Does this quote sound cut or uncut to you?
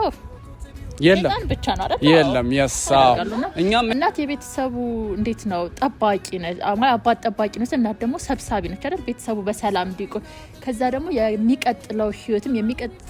cut